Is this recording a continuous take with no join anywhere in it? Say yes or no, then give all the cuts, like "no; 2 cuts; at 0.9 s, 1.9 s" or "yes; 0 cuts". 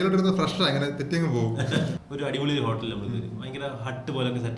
no; 1 cut; at 2.0 s